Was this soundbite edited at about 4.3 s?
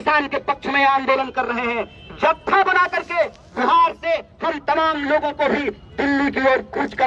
no; 0 cuts

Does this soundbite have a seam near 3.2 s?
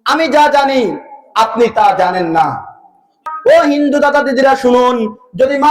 yes; 1 cut; at 3.2 s

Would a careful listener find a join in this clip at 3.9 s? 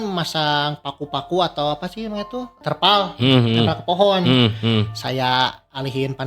no; 1 cut; at 2.5 s

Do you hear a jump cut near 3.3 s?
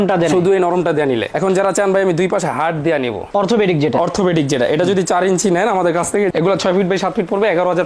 yes; 2 cuts; at 1.3 s, 3.3 s

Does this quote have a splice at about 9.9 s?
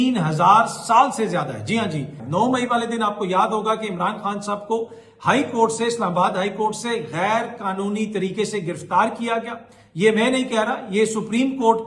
no; 1 cut; at 2.2 s

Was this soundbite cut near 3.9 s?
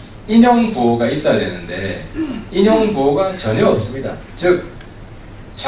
yes; 1 cut; at 3.9 s

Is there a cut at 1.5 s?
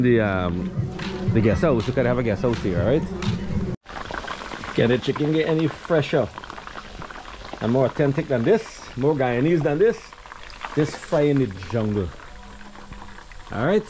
no; 1 cut; at 3.7 s

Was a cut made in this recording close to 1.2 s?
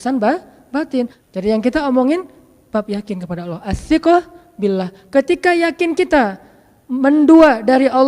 yes; 1 cut; at 1.2 s

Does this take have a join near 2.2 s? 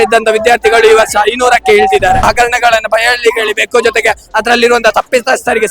yes; 1 cut; at 2.2 s

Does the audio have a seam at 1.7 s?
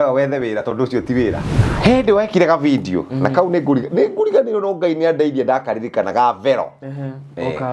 yes; 1 cut; at 1.7 s

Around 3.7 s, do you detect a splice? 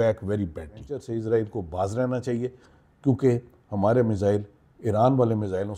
no; 1 cut; at 1.0 s

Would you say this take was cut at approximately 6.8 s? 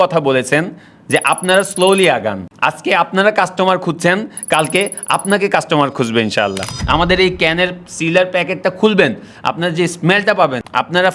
yes; 1 cut; at 6.8 s

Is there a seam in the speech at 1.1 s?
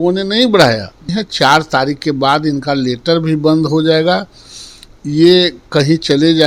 yes; 1 cut; at 1.1 s

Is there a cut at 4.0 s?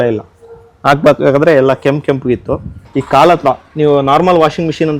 no; 1 cut; at 2.8 s

